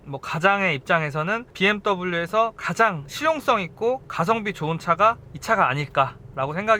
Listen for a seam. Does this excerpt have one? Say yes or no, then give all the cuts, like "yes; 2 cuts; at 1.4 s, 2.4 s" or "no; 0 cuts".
no; 0 cuts